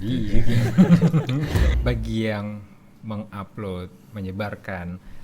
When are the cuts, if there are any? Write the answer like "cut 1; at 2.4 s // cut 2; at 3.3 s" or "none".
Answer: cut 1; at 1.7 s